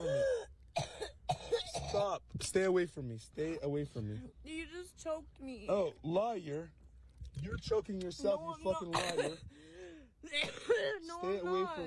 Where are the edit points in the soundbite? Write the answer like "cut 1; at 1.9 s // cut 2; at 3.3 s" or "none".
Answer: none